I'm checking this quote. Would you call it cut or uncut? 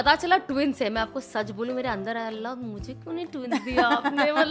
uncut